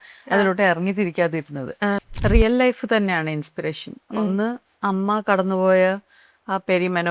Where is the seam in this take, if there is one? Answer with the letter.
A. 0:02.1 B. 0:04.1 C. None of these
A